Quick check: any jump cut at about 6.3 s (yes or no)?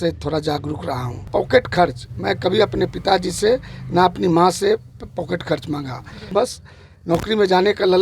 yes